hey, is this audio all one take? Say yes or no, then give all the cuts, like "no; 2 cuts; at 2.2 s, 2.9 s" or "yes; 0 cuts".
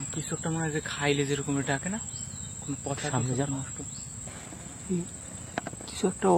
no; 1 cut; at 4.3 s